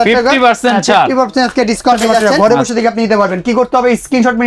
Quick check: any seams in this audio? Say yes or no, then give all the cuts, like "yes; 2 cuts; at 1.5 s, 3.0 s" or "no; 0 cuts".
yes; 1 cut; at 2.1 s